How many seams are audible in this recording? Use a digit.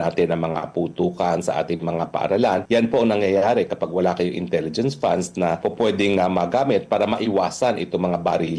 2